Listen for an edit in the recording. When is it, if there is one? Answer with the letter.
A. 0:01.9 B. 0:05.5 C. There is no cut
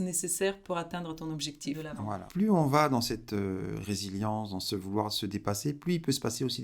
A